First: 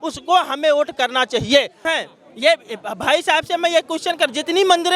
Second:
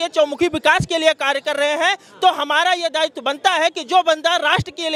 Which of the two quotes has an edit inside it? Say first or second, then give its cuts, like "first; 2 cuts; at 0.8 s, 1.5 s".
first; 1 cut; at 1.8 s